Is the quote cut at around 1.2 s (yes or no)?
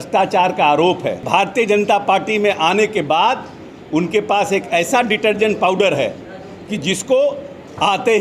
yes